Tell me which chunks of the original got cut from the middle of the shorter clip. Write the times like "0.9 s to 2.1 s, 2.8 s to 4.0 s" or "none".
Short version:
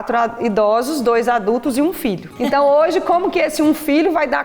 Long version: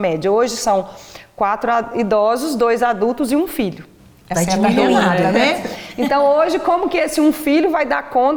3.8 s to 5.9 s